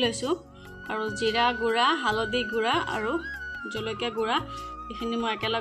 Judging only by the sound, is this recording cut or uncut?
uncut